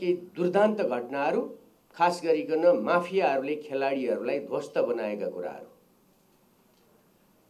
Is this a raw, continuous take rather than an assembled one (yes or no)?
yes